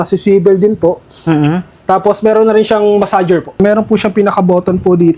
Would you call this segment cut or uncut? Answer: cut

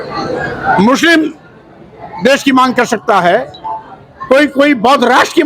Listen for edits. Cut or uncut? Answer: uncut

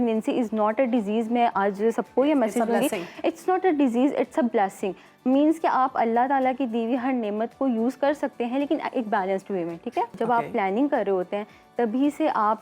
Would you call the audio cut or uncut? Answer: cut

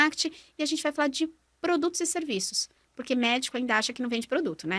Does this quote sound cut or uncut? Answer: uncut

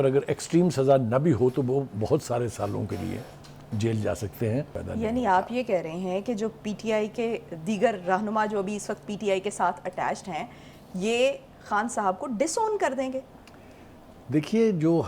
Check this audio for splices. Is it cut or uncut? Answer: cut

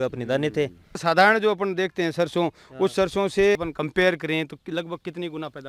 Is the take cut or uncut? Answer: cut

